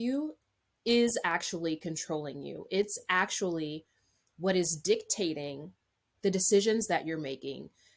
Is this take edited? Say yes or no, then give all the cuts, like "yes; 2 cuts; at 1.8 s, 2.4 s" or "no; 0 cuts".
no; 0 cuts